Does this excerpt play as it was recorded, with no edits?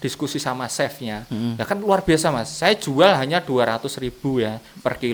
yes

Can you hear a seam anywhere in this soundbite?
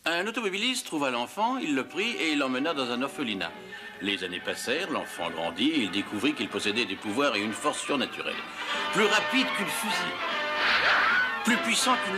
yes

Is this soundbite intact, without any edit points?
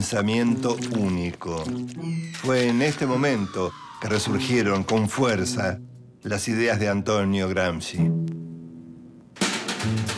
yes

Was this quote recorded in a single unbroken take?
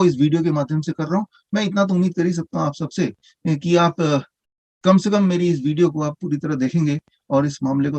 yes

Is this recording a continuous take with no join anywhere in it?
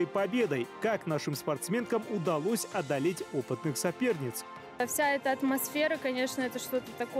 yes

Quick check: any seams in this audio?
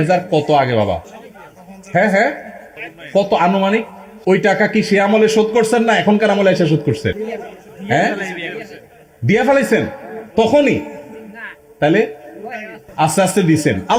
no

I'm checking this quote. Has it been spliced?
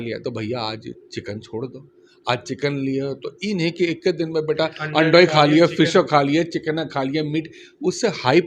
no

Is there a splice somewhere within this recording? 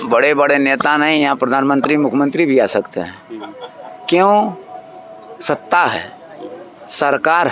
no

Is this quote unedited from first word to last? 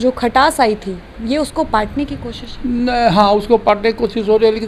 yes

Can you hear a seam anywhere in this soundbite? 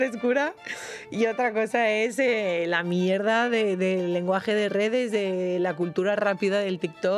no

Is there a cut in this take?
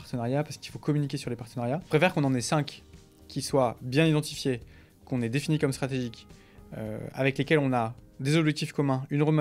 yes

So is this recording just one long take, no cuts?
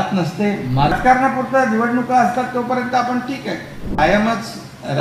no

